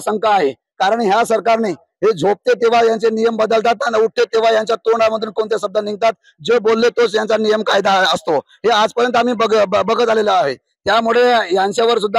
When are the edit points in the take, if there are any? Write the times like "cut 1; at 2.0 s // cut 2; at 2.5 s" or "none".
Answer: none

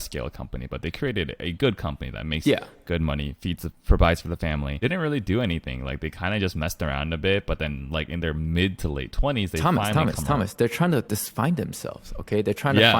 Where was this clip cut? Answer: cut 1; at 4.7 s

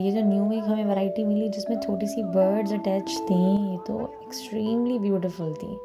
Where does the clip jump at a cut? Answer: none

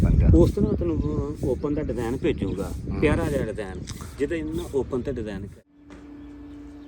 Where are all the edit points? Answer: cut 1; at 5.5 s

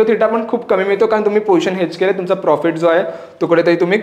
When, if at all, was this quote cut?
none

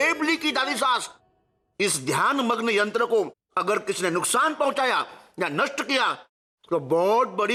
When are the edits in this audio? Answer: none

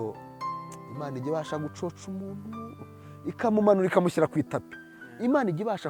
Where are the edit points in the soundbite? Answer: none

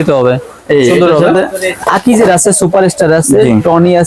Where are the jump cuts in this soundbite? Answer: cut 1; at 2.0 s

